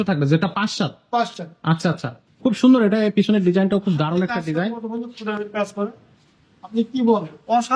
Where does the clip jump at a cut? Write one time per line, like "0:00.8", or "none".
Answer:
0:02.1